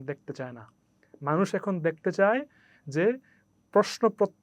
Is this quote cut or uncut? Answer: uncut